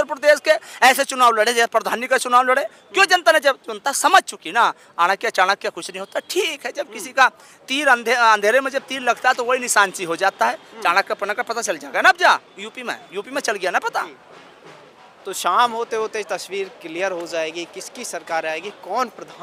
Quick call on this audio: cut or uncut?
uncut